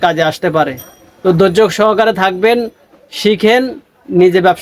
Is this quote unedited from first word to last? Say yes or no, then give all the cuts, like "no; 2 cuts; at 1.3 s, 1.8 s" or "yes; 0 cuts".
yes; 0 cuts